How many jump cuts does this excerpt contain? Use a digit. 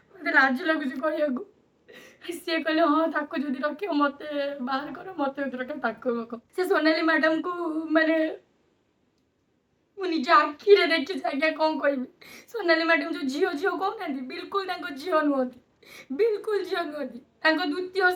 1